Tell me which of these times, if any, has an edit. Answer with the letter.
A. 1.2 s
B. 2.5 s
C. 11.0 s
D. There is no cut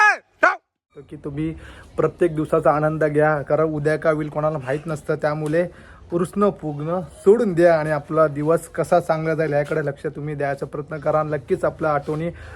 A